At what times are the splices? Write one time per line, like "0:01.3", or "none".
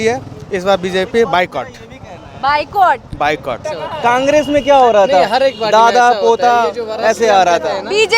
0:03.7